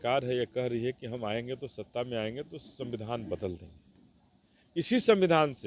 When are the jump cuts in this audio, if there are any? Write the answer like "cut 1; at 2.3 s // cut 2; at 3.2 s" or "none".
none